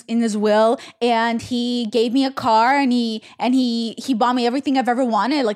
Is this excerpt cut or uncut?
uncut